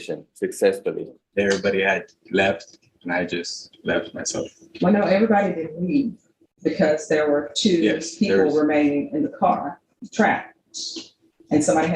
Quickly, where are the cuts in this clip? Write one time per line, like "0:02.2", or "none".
0:01.1